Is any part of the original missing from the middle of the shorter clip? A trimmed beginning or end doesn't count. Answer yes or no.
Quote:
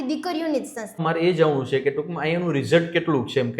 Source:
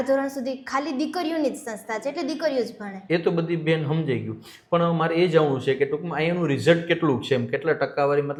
yes